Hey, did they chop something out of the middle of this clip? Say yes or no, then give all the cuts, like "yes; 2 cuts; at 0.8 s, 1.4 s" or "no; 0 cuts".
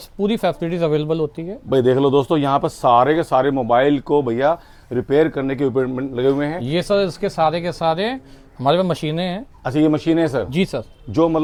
no; 0 cuts